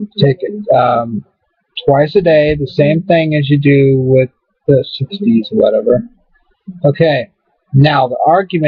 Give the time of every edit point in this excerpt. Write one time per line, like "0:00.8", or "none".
none